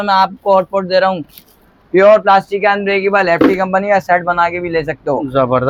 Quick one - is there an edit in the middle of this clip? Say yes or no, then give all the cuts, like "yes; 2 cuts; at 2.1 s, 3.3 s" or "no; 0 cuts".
no; 0 cuts